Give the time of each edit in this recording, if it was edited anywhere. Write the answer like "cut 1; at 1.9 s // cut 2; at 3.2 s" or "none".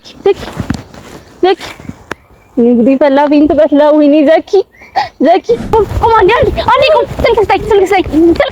cut 1; at 5.7 s